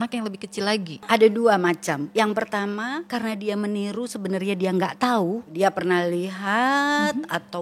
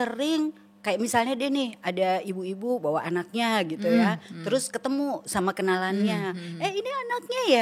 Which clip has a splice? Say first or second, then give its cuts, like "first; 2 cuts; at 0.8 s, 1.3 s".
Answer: first; 4 cuts; at 1.0 s, 2.1 s, 3.0 s, 5.5 s